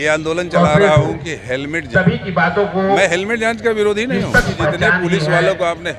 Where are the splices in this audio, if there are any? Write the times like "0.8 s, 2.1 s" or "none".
4.5 s